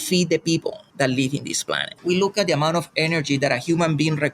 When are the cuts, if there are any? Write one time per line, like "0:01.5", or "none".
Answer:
0:01.9